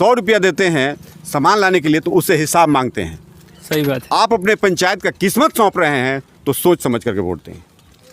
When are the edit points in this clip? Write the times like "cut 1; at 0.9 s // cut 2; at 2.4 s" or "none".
none

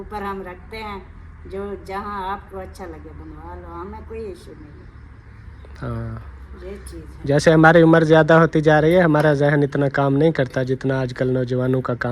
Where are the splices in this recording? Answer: none

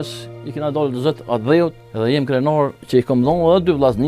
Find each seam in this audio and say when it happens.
cut 1; at 1.8 s // cut 2; at 2.8 s

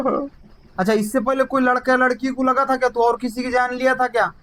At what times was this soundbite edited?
none

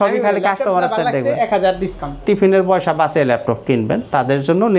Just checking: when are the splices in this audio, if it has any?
cut 1; at 2.2 s

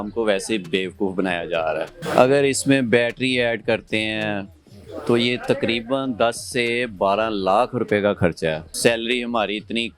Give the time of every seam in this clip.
cut 1; at 2.0 s // cut 2; at 8.7 s

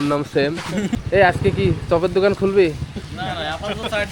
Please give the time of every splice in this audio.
cut 1; at 1.0 s

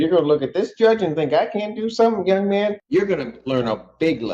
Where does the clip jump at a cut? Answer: cut 1; at 2.8 s

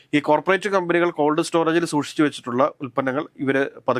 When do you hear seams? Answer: none

